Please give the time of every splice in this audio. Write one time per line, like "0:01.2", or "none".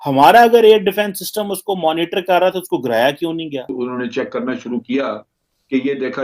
0:03.7